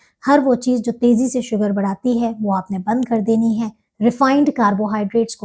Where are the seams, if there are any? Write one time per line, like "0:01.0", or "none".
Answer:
none